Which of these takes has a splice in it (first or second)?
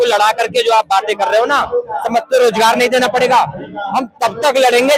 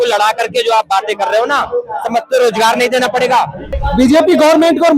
second